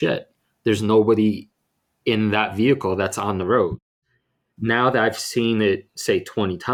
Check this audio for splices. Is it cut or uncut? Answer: uncut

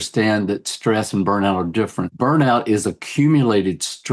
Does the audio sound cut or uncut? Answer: cut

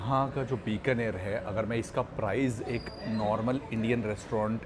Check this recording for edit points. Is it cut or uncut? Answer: uncut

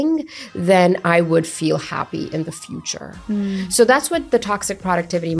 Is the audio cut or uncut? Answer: uncut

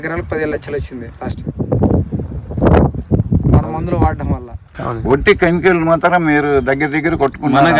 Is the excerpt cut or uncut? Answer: cut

